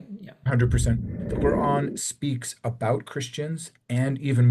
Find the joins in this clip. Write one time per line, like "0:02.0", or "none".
0:01.1